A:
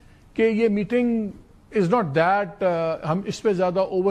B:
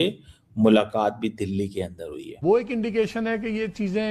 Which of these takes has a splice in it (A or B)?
B